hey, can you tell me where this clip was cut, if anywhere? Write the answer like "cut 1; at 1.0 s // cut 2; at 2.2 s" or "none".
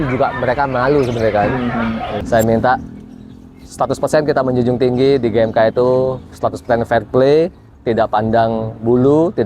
cut 1; at 2.2 s